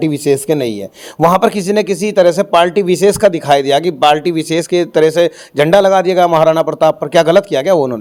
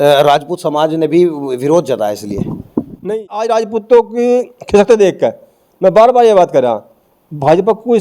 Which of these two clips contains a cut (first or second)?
second